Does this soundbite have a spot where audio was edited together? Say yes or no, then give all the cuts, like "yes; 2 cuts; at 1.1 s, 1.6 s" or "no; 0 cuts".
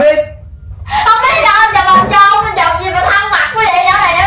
no; 0 cuts